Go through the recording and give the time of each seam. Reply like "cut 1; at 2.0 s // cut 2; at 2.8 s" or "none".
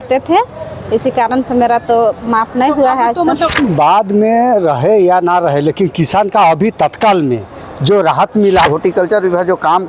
cut 1; at 3.5 s // cut 2; at 8.7 s